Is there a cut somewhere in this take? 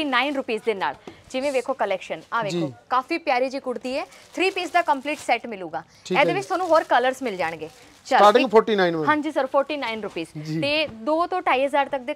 no; 0 cuts

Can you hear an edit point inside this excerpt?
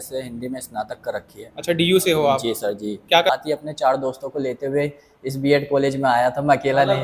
yes; 1 cut; at 3.3 s

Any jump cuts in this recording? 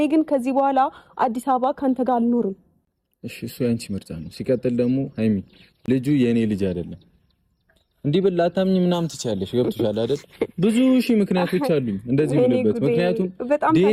no; 0 cuts

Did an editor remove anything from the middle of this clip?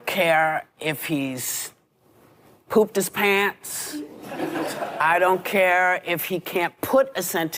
no; 0 cuts

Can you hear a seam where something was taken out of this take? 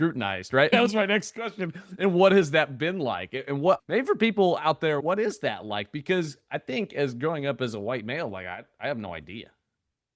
yes; 3 cuts; at 0.7 s, 3.8 s, 5.0 s

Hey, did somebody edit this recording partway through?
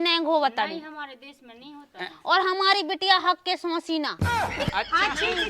no; 0 cuts

